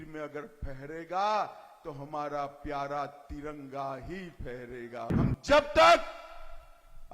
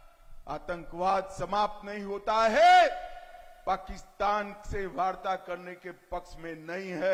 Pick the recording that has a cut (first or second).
first